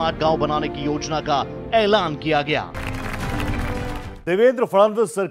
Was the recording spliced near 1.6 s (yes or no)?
yes